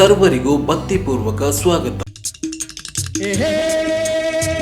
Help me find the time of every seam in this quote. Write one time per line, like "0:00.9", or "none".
0:02.2